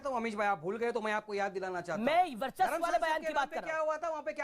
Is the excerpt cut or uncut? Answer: uncut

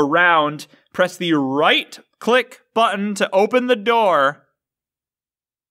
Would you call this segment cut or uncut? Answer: uncut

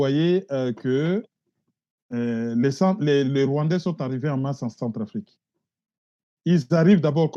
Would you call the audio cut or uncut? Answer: uncut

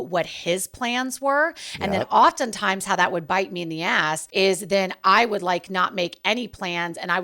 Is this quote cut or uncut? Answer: cut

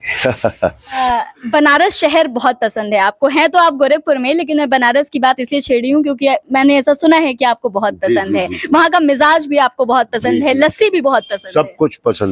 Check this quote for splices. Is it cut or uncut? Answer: cut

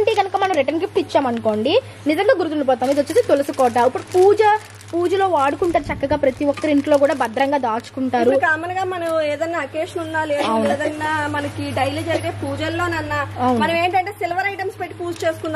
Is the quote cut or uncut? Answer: uncut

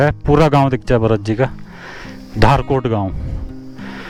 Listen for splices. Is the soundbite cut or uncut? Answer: uncut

